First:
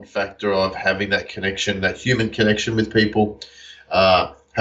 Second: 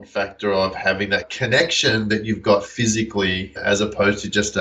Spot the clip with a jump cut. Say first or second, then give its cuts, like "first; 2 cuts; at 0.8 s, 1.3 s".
second; 2 cuts; at 1.3 s, 3.6 s